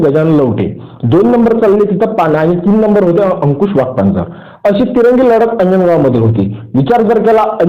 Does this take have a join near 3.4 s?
no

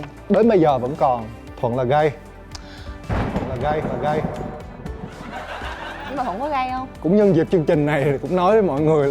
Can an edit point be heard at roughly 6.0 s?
yes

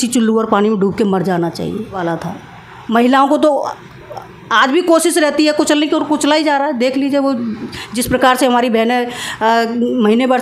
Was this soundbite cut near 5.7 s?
no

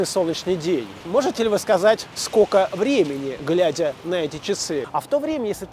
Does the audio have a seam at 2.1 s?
yes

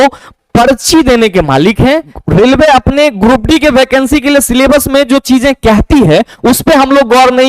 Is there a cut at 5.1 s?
no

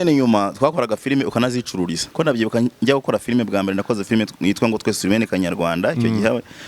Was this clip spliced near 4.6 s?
no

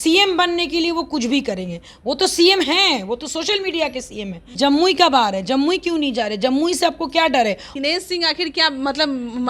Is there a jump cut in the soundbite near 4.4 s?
yes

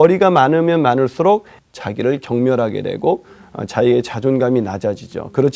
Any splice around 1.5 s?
yes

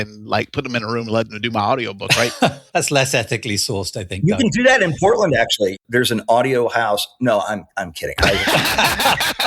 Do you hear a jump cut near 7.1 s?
no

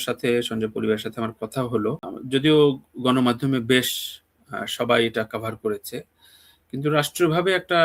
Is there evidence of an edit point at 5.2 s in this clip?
no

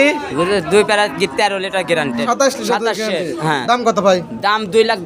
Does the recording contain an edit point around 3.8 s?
no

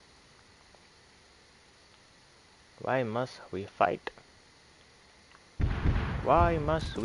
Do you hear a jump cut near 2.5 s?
no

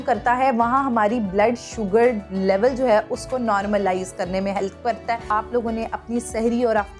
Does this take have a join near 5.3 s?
yes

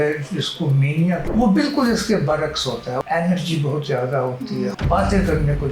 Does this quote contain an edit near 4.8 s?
yes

